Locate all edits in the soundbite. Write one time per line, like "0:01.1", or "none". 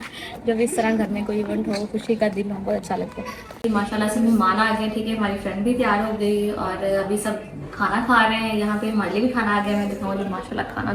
none